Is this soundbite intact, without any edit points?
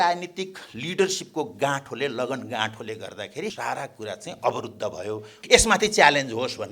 no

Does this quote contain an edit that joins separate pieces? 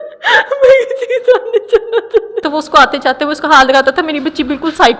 yes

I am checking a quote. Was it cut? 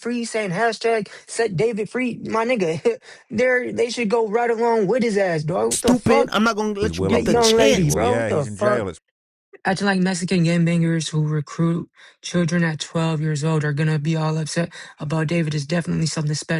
yes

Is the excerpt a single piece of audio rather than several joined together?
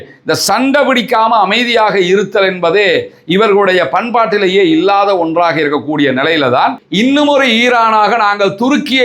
no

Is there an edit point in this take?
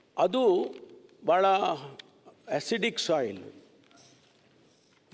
no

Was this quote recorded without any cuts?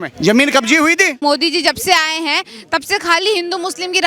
no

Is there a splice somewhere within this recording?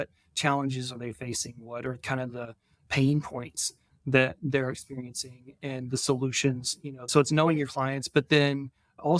yes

